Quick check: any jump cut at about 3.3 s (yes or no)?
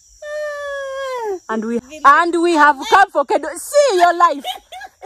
no